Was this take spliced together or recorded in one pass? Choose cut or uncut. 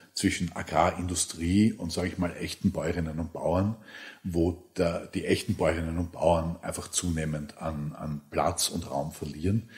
uncut